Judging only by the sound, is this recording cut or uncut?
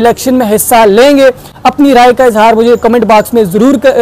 uncut